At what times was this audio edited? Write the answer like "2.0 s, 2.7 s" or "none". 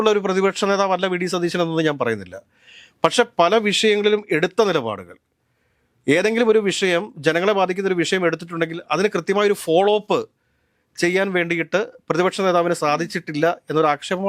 none